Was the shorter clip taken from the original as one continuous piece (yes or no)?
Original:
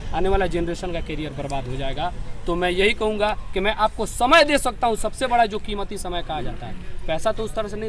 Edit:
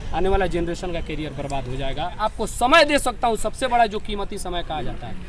no